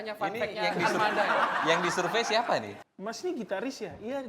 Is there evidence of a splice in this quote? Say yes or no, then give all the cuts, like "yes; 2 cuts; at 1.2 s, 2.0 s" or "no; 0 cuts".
yes; 1 cut; at 2.8 s